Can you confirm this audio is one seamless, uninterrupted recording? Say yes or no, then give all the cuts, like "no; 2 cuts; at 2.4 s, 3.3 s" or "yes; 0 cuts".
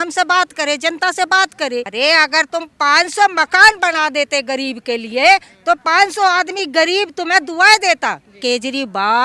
no; 2 cuts; at 1.9 s, 8.4 s